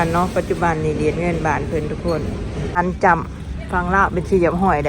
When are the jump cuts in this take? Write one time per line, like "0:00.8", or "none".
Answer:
0:02.8